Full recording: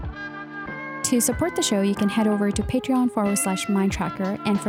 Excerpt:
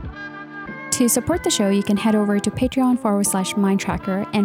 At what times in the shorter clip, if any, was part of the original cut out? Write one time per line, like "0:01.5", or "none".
0:00.9